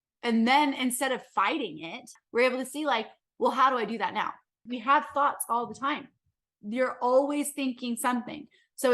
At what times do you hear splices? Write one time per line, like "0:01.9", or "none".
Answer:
0:02.1
0:04.7